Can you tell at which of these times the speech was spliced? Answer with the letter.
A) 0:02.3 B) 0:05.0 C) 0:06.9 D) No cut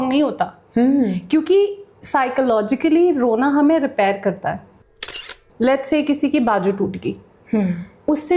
B